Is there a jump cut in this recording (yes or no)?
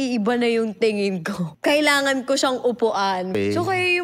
yes